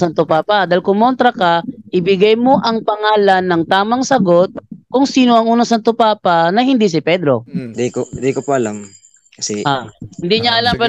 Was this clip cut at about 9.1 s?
no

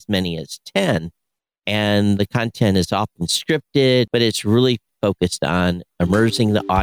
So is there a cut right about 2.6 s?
no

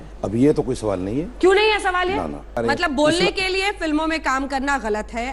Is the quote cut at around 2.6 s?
yes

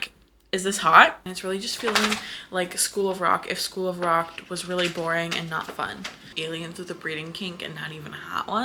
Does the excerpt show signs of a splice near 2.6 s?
no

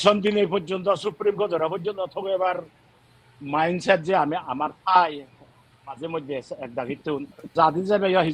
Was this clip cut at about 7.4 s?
yes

